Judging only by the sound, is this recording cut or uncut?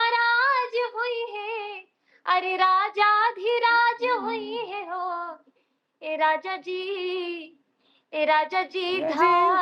uncut